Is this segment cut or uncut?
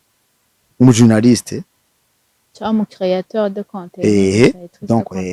uncut